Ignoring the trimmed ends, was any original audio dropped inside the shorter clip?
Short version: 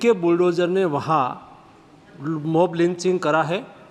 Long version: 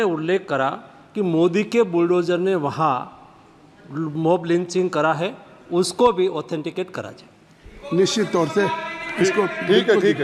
no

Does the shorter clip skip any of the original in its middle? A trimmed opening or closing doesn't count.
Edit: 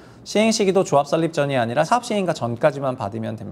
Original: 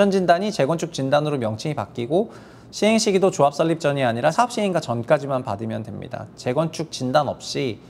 no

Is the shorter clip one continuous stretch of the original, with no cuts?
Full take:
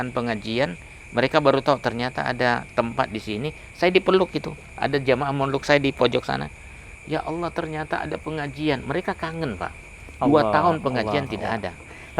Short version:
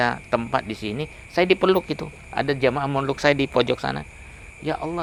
yes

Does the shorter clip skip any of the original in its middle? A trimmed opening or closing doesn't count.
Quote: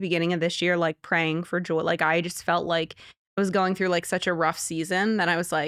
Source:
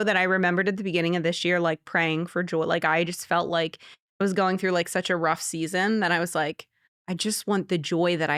no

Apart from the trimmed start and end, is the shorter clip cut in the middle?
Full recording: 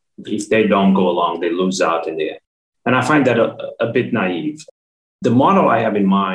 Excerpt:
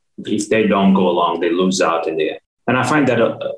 yes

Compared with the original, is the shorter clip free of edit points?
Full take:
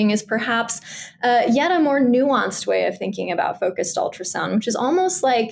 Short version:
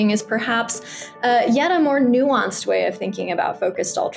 yes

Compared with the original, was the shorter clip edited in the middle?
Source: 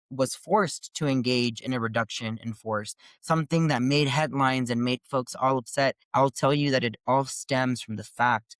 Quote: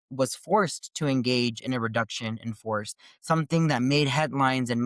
no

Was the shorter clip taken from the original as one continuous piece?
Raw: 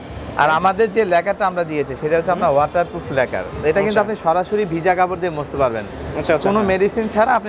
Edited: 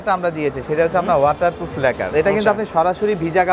no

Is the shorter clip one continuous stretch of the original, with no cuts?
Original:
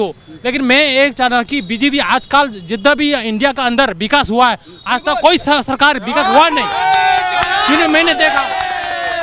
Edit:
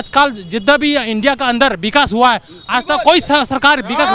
yes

